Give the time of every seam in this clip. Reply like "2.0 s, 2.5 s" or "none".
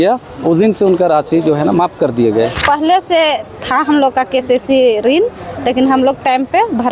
2.6 s